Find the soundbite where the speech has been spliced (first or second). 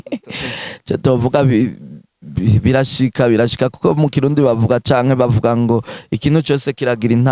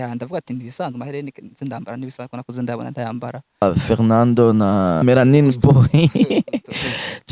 second